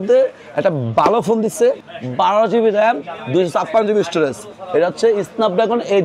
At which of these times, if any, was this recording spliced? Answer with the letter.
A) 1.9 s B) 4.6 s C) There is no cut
A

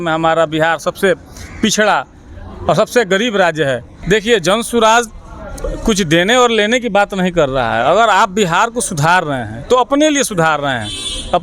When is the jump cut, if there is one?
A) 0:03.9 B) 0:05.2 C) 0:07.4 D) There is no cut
A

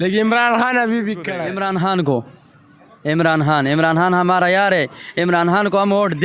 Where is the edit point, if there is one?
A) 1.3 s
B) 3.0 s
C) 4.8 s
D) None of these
A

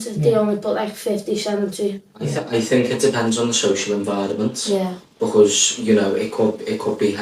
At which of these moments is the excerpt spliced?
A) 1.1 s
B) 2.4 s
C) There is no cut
B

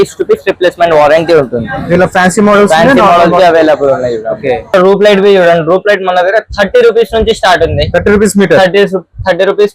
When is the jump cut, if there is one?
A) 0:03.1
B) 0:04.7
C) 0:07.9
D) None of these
B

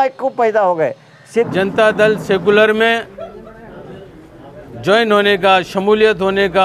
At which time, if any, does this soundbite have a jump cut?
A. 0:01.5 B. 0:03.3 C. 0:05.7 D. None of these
A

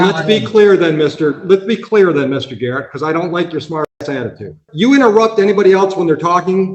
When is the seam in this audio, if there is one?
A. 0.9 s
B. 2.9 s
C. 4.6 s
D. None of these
C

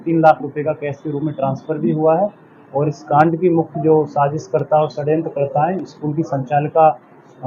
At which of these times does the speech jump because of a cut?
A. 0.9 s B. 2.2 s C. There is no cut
C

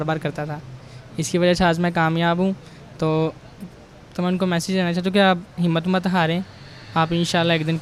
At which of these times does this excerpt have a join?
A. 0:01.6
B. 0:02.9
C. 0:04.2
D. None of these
D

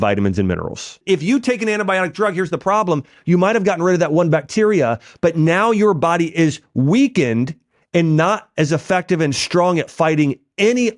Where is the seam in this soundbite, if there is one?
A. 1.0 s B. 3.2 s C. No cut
A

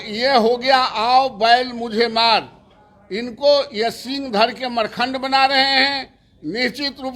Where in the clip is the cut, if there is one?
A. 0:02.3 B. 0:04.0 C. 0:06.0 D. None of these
D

